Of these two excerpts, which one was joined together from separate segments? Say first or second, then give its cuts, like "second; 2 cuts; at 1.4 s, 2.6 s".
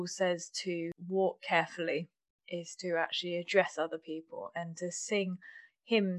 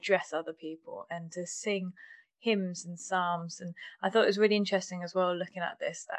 first; 1 cut; at 1.0 s